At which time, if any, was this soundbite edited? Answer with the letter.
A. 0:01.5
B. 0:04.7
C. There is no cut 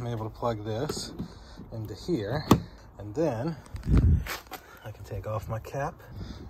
C